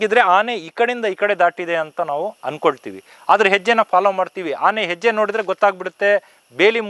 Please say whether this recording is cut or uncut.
uncut